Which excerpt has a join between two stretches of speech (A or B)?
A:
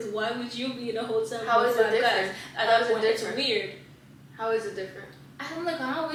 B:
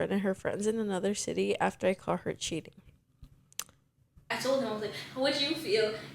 B